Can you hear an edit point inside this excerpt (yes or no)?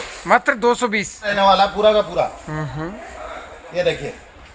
yes